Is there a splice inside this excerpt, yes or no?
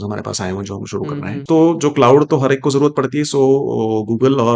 yes